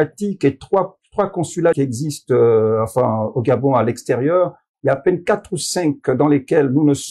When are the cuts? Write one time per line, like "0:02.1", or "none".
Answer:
0:01.8